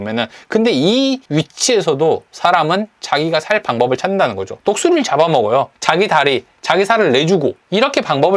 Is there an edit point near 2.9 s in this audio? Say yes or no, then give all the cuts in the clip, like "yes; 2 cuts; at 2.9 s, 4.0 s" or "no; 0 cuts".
no; 3 cuts; at 1.2 s, 4.5 s, 5.7 s